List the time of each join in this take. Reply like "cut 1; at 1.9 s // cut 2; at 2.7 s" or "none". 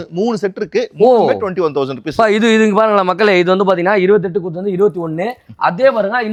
none